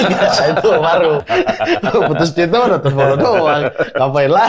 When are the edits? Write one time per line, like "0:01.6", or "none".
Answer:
0:01.2

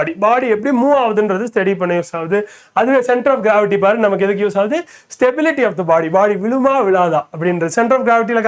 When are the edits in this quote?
none

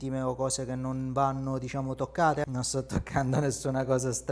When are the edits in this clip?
0:02.5

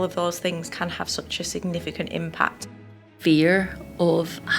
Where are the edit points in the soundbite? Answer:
0:02.9

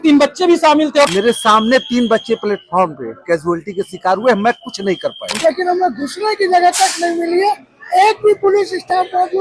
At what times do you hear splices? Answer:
0:01.1
0:05.4

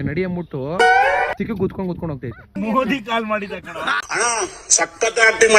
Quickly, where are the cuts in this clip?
0:02.6

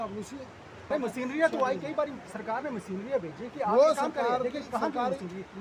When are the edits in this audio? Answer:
0:00.9

